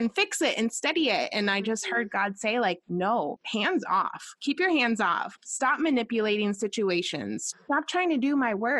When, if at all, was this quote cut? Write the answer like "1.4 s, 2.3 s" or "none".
3.2 s, 5.3 s, 7.4 s